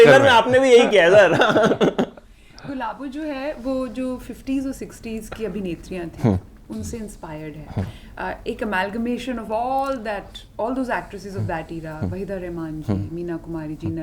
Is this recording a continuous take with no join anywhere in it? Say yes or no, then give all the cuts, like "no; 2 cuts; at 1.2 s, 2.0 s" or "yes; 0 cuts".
yes; 0 cuts